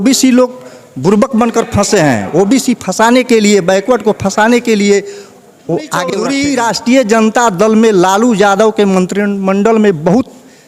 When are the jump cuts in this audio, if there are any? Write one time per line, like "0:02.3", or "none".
0:06.1